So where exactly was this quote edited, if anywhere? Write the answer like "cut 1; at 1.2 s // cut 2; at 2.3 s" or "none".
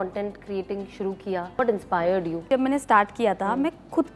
cut 1; at 1.6 s // cut 2; at 2.5 s